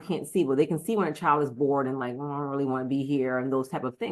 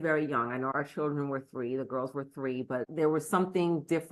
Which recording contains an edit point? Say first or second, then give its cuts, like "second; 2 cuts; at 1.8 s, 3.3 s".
second; 2 cuts; at 0.7 s, 2.9 s